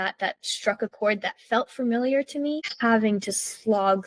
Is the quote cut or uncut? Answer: cut